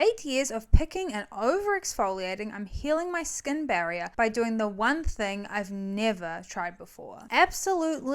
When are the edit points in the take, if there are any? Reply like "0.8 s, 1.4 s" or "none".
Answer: 4.0 s